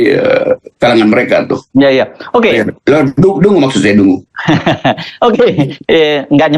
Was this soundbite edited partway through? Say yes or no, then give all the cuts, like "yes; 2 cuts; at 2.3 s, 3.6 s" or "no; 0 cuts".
yes; 1 cut; at 1.6 s